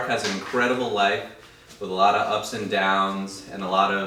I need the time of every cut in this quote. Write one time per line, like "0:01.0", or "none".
none